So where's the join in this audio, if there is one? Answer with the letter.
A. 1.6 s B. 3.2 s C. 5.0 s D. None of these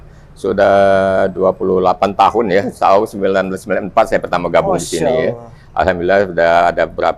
D